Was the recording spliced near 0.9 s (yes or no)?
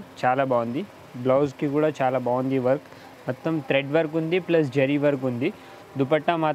no